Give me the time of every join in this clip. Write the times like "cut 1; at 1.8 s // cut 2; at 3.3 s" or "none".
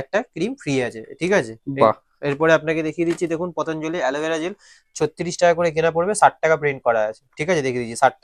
none